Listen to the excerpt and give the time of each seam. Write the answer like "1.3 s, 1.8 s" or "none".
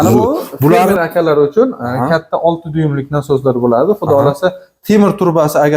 1.0 s